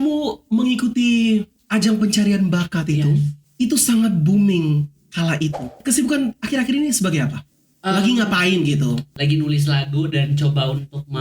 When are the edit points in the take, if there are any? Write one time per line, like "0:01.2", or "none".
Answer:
0:01.6
0:03.4
0:05.8
0:09.2